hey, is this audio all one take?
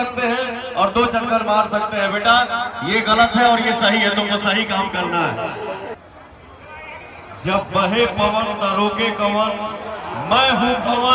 no; 1 cut; at 6.0 s

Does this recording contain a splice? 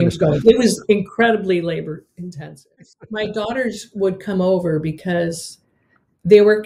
yes; 1 cut; at 2.7 s

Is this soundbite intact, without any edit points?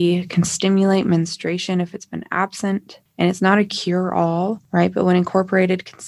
no; 2 cuts; at 3.0 s, 4.6 s

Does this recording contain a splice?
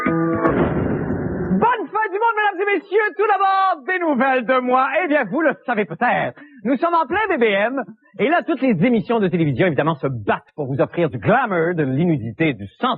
no; 0 cuts

